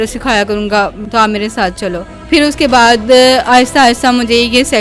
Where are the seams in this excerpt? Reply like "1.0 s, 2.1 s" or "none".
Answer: 1.0 s, 2.1 s